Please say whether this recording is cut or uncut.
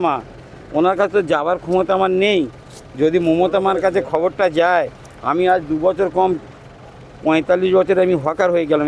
uncut